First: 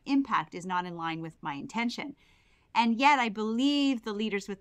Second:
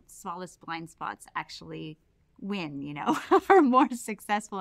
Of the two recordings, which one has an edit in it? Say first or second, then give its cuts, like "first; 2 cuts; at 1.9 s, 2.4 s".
first; 1 cut; at 2.4 s